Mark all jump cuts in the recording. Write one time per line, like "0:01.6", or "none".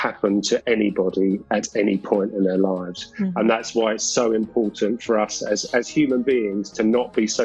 none